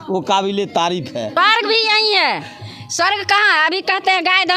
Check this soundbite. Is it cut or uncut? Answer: cut